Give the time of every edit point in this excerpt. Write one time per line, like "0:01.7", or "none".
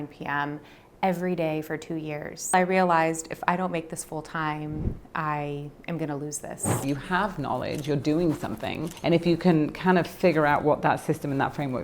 0:02.5
0:06.8
0:08.9